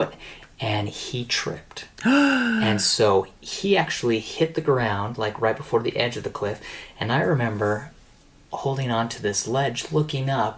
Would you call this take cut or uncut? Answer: uncut